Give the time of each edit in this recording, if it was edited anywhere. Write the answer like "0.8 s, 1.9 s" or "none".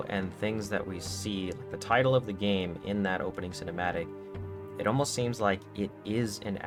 none